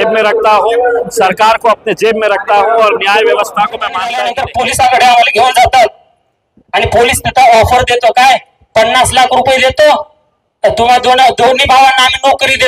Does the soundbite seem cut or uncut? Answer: cut